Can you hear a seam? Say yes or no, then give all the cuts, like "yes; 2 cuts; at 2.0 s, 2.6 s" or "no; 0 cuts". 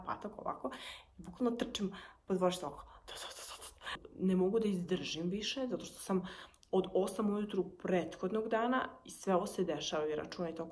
yes; 1 cut; at 4.0 s